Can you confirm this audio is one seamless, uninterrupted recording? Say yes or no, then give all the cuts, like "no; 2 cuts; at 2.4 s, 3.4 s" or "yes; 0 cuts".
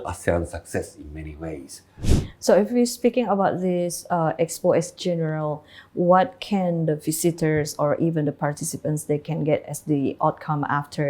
no; 1 cut; at 2.0 s